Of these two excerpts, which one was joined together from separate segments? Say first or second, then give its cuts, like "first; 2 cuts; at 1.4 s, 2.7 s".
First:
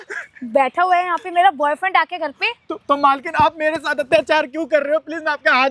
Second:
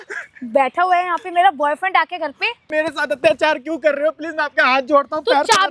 second; 1 cut; at 2.7 s